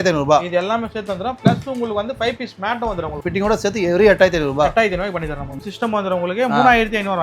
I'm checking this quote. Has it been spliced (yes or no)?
yes